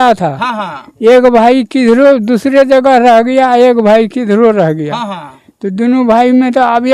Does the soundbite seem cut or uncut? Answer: uncut